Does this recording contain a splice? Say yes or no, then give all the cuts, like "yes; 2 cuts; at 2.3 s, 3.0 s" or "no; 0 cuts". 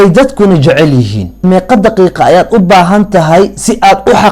yes; 1 cut; at 1.4 s